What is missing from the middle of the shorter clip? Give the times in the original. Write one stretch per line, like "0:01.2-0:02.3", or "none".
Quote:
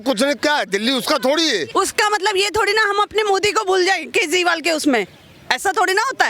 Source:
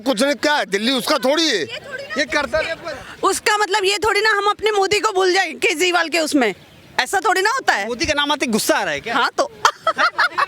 0:01.7-0:03.1